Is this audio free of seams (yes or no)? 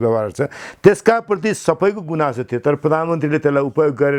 yes